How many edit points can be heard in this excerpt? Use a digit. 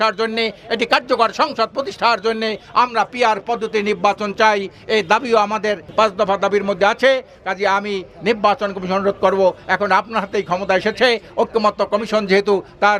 0